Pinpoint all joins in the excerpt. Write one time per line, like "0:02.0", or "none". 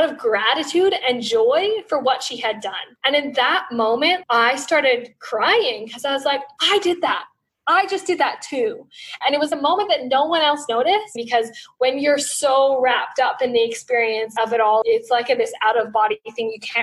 0:09.2
0:11.2